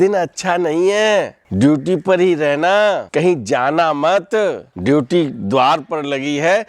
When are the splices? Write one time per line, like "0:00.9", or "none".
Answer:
0:01.4
0:03.1
0:04.7